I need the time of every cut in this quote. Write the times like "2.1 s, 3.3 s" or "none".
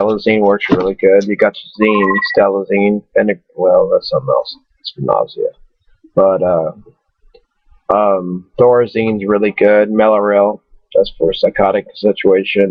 none